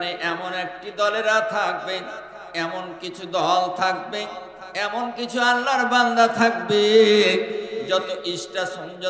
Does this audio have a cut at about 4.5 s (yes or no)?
no